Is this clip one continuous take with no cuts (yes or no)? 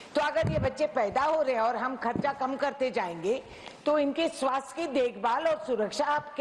yes